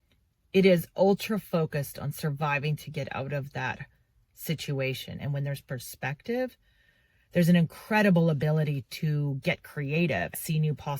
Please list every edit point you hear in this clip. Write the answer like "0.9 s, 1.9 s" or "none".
5.2 s